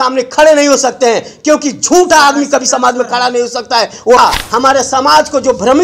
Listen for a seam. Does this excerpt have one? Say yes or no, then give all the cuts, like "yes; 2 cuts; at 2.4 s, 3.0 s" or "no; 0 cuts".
yes; 1 cut; at 4.2 s